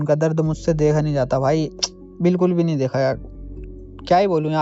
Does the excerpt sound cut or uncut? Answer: uncut